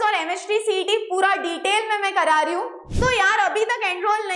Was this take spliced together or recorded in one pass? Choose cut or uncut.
cut